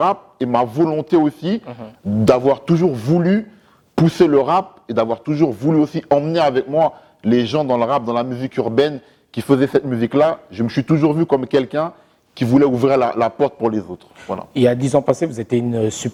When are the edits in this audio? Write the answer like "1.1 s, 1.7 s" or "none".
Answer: none